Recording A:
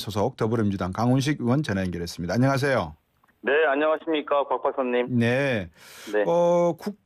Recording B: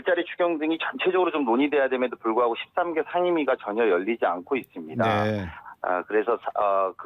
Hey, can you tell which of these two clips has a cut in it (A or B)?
B